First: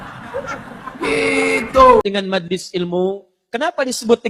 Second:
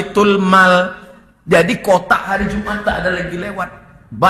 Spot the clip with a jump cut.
first; 1 cut; at 2.0 s

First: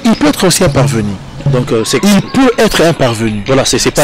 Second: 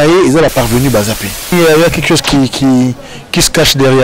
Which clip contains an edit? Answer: second; 1 cut; at 1.5 s

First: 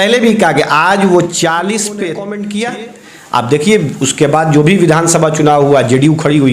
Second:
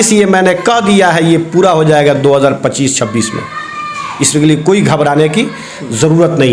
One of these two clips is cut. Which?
first; 1 cut; at 2.2 s

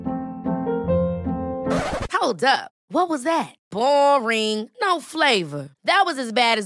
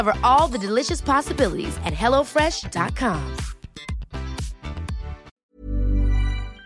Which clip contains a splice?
second; 1 cut; at 5.3 s

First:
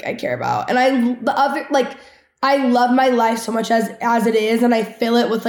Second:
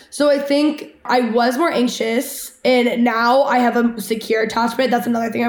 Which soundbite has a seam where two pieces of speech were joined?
second; 1 cut; at 1.0 s

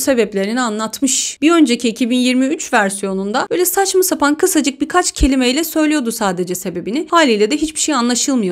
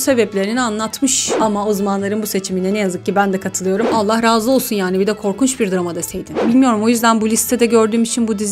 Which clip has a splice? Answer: second; 3 cuts; at 1.4 s, 3.9 s, 6.4 s

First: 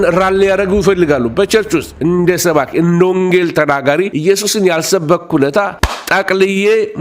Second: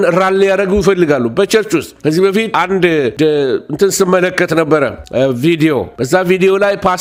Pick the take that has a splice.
first; 1 cut; at 1.9 s

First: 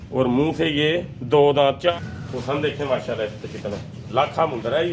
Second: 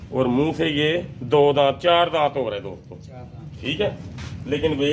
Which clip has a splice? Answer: first; 1 cut; at 1.9 s

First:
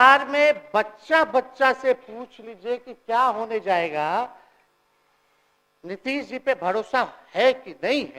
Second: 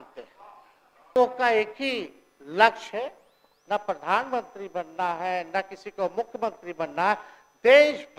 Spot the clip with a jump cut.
second; 1 cut; at 1.2 s

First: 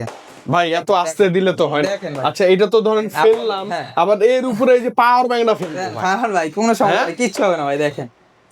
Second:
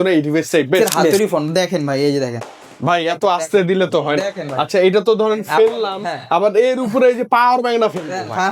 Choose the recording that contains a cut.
second; 1 cut; at 1.1 s

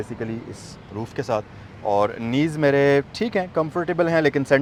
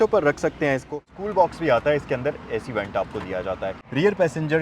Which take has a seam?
second; 2 cuts; at 1.0 s, 3.8 s

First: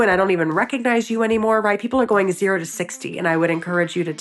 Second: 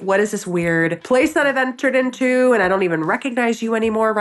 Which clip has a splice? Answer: second; 1 cut; at 1.0 s

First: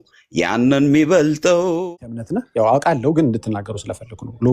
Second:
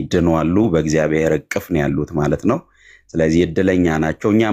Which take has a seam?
first; 1 cut; at 1.8 s

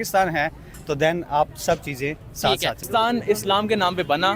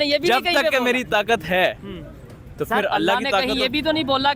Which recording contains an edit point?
first; 1 cut; at 2.9 s

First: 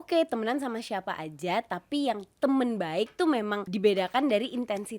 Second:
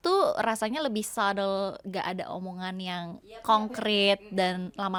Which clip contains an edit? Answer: first; 1 cut; at 3.7 s

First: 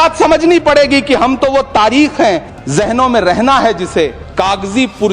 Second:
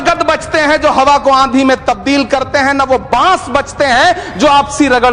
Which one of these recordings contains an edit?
first; 2 cuts; at 2.5 s, 4.2 s

